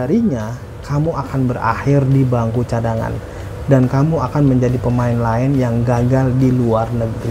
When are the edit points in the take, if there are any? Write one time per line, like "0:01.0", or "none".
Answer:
none